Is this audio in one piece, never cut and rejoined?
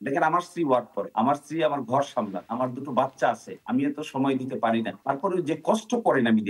no; 4 cuts; at 1.0 s, 2.4 s, 3.5 s, 4.9 s

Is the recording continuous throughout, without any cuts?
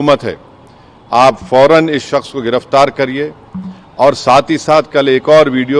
yes; 0 cuts

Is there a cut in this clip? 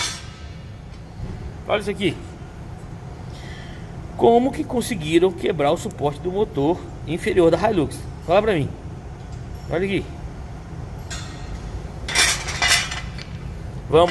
no; 0 cuts

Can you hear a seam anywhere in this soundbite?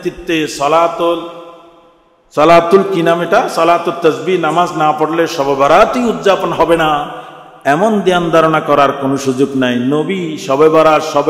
no; 0 cuts

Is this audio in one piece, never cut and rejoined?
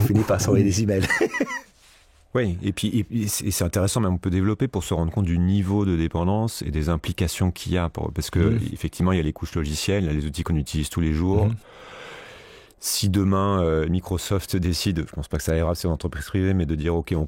yes; 0 cuts

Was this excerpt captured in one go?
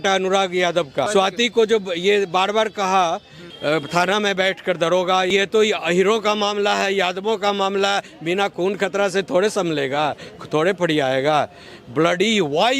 no; 3 cuts; at 1.1 s, 3.4 s, 5.3 s

